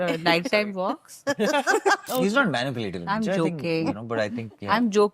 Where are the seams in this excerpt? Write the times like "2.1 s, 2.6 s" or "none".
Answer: 2.0 s